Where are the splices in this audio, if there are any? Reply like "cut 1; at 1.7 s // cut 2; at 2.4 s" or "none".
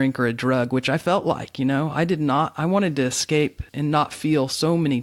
cut 1; at 3.7 s